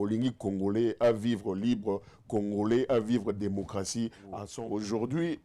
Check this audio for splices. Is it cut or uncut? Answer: cut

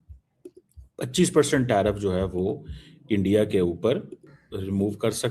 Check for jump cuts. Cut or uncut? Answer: cut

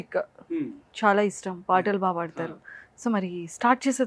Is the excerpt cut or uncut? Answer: uncut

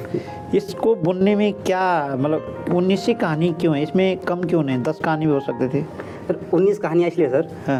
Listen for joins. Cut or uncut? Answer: uncut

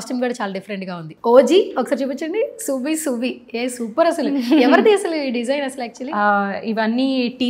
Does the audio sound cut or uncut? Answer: uncut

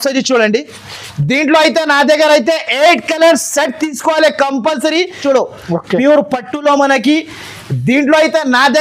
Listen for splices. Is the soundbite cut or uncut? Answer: cut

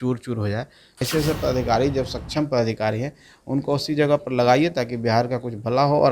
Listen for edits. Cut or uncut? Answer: cut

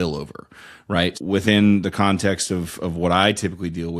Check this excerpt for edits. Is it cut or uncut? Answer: cut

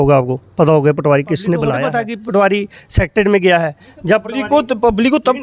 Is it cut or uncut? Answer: cut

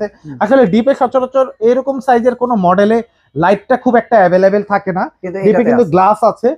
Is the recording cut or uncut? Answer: uncut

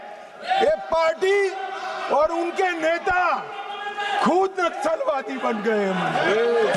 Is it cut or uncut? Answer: uncut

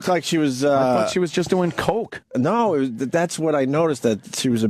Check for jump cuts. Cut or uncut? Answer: uncut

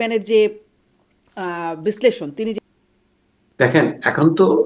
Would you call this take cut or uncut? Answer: cut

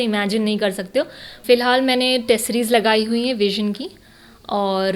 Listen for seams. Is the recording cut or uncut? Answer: cut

